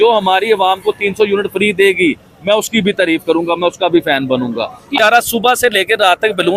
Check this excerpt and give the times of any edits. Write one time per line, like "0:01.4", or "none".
0:04.9